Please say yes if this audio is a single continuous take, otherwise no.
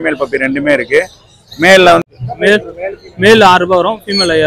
no